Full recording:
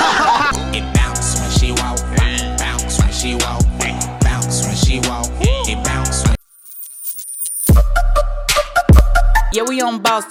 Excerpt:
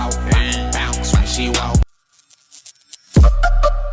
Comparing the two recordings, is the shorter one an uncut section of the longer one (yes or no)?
no